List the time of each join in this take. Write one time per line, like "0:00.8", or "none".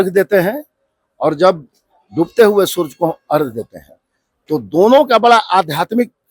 none